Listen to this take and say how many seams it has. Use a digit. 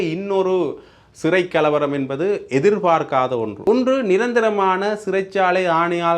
1